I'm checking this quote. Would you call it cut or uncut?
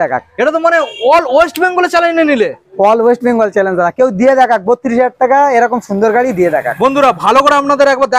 uncut